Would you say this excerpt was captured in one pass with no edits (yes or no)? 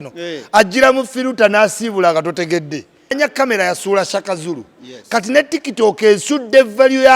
no